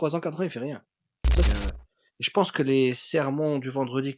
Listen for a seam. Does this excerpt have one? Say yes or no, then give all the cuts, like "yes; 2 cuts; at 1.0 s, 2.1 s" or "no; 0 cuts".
yes; 1 cut; at 1.5 s